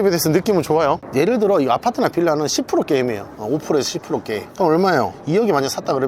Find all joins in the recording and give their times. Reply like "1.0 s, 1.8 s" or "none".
1.0 s